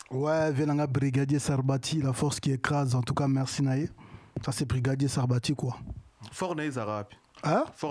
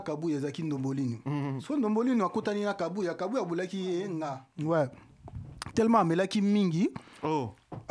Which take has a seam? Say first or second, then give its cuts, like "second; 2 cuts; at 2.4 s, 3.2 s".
second; 1 cut; at 4.4 s